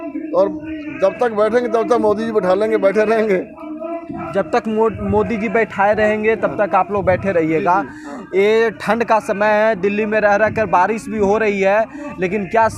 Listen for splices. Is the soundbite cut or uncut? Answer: uncut